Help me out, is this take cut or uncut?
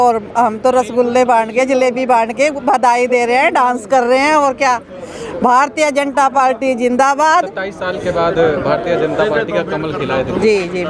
uncut